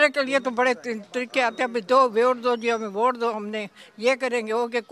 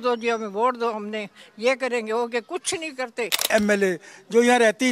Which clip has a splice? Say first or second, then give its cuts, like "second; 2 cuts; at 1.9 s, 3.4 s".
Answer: second; 1 cut; at 3.5 s